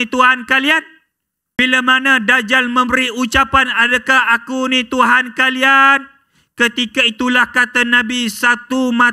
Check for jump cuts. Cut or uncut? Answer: cut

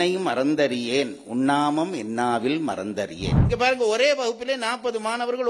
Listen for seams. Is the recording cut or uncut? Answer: cut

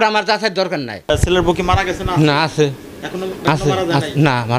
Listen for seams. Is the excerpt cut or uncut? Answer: cut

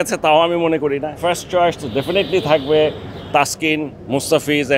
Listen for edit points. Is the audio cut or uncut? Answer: cut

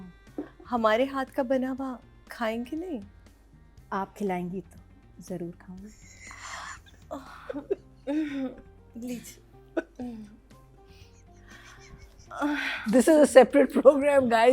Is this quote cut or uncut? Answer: uncut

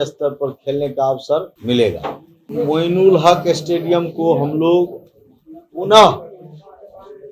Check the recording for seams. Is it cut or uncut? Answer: cut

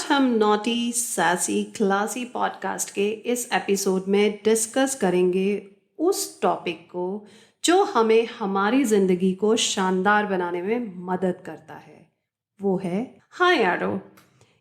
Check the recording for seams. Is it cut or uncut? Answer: cut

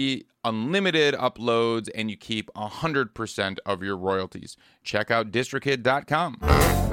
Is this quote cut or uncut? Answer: uncut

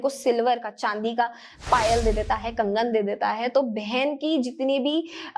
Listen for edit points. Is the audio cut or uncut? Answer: uncut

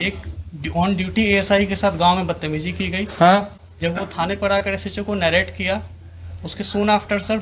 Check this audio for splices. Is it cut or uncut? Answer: uncut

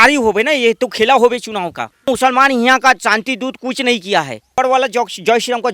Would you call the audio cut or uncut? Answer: cut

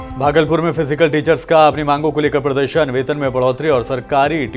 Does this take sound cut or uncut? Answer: uncut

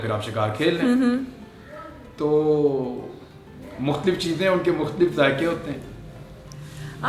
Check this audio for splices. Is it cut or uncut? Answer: uncut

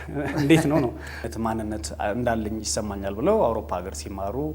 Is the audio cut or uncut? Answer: cut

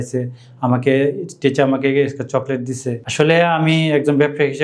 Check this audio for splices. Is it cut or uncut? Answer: uncut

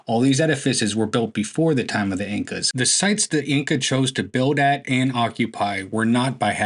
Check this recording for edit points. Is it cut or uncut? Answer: cut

